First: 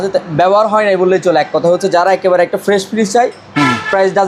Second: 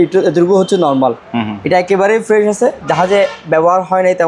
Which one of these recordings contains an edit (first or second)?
second